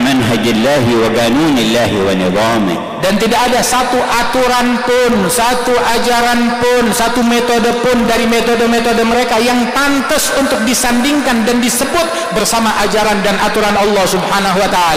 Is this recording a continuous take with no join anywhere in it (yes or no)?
yes